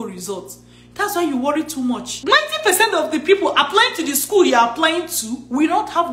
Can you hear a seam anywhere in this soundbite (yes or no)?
yes